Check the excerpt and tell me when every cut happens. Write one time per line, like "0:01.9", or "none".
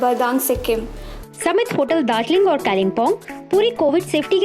0:01.1